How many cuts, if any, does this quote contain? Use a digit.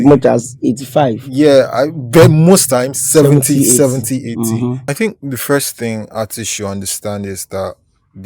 1